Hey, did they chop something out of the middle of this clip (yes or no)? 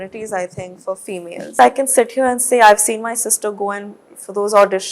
yes